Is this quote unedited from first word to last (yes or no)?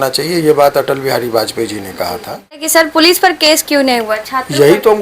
no